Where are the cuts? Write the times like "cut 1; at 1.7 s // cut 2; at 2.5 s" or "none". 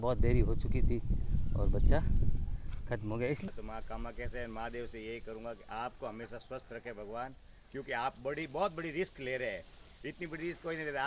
cut 1; at 3.5 s